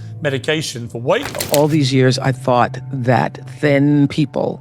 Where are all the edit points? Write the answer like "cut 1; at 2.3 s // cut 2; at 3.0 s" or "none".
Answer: cut 1; at 1.4 s